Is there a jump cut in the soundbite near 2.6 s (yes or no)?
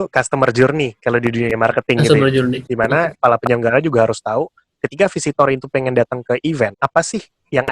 yes